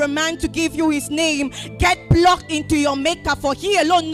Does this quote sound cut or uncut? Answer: uncut